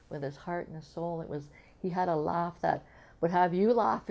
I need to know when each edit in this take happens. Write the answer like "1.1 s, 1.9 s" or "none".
none